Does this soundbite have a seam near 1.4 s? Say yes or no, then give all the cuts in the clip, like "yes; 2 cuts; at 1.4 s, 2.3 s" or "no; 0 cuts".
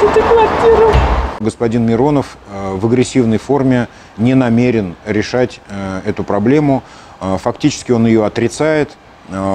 yes; 2 cuts; at 1.4 s, 6.9 s